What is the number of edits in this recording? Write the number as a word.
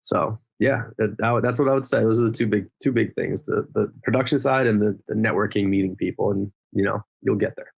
zero